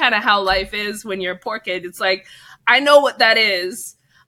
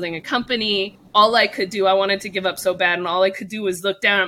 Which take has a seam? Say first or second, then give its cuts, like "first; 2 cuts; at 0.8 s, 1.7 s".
second; 1 cut; at 1.0 s